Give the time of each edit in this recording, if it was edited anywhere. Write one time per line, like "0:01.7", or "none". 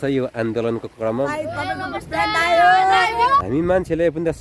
0:01.1
0:03.5